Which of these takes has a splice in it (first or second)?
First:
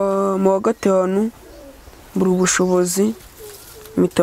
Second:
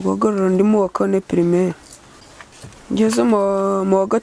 second